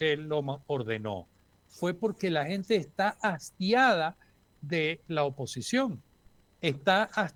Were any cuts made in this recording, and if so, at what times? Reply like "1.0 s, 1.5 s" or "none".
none